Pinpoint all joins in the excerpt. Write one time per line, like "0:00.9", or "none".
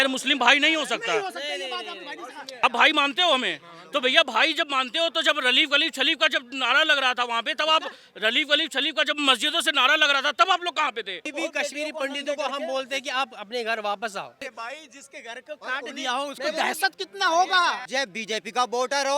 0:02.6
0:11.3
0:14.4
0:17.9

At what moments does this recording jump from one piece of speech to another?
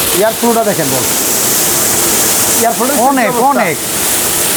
none

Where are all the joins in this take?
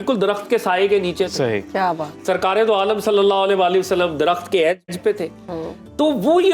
none

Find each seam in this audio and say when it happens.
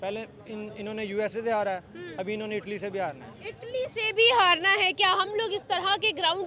none

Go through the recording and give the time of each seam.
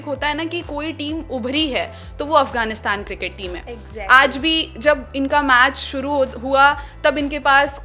none

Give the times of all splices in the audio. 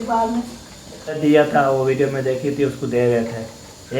0:01.2

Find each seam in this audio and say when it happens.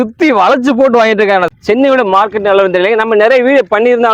0:01.5

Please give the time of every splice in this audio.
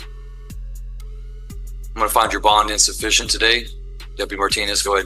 0:01.9

